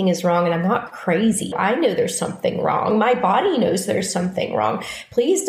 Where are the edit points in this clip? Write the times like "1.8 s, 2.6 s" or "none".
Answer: 1.5 s